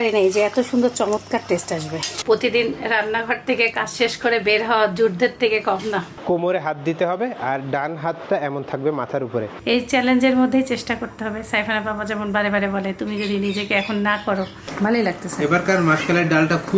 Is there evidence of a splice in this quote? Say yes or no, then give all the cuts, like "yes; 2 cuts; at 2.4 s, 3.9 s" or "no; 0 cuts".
yes; 4 cuts; at 2.1 s, 6.1 s, 9.5 s, 14.6 s